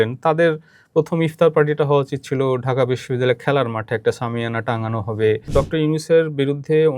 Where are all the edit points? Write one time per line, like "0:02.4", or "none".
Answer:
0:05.5